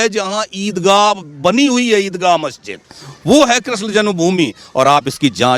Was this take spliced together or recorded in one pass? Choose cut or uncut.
uncut